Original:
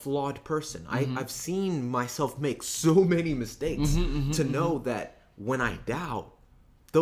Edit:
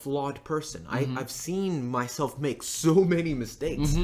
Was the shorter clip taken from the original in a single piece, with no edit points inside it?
yes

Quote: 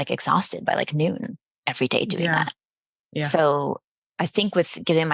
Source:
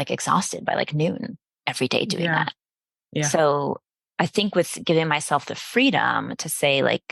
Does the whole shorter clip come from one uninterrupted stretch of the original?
yes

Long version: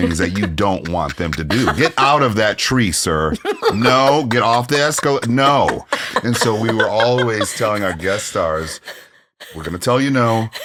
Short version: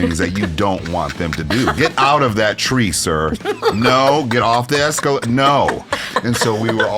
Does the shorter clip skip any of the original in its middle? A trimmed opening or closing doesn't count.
no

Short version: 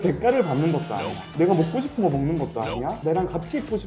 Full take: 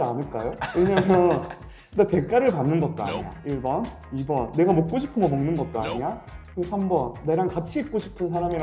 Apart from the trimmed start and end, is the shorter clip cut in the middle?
yes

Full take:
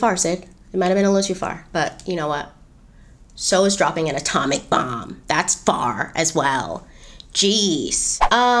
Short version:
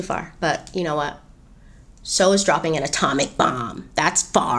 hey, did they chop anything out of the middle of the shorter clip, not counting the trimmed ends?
no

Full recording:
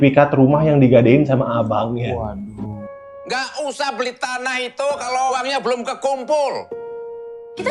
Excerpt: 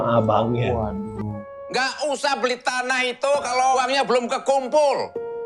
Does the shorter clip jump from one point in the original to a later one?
yes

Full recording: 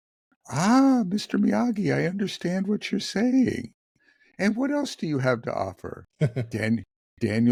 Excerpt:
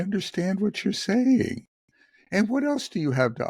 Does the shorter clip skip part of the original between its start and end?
no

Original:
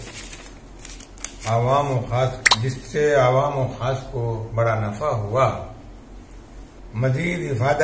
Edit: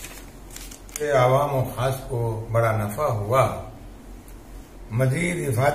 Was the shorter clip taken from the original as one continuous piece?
no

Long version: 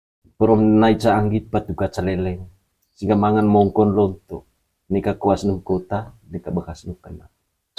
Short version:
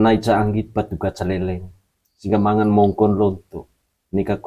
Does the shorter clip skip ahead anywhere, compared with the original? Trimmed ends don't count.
no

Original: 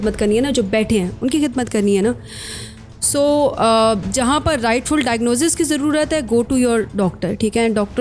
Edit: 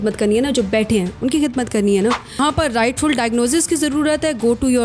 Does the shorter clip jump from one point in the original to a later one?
yes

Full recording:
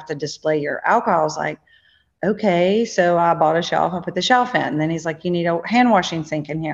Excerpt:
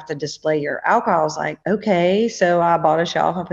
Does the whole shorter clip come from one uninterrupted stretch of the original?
no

